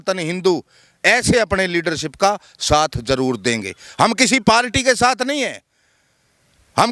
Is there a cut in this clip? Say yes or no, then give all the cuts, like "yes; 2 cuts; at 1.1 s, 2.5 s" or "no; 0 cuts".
no; 0 cuts